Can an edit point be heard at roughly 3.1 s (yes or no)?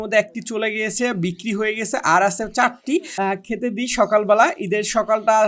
yes